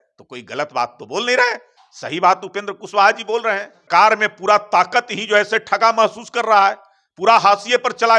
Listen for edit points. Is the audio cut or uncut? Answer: cut